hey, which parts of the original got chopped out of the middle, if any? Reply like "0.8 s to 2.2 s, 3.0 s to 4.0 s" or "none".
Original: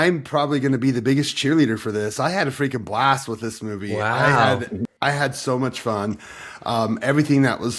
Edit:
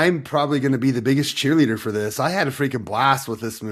none